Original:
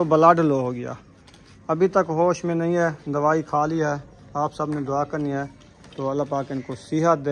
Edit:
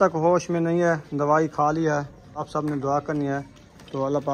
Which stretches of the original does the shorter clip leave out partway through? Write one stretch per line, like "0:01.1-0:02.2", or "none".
0:04.3-0:04.4